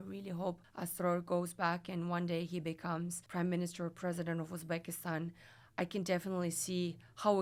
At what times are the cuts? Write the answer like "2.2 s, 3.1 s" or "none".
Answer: none